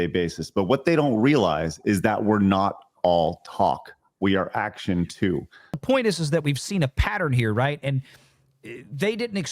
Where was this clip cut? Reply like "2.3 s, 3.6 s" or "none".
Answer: 5.8 s